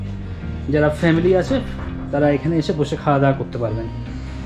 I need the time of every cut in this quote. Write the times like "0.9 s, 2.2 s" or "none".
none